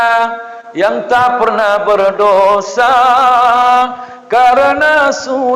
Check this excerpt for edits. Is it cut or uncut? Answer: uncut